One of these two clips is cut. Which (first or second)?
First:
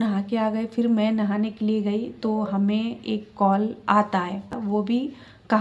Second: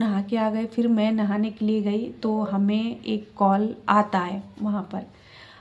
first